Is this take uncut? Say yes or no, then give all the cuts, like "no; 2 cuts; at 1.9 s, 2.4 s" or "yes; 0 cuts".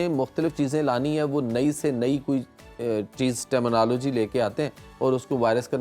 yes; 0 cuts